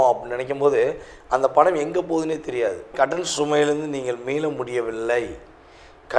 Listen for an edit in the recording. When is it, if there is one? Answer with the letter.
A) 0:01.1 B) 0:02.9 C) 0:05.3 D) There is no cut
B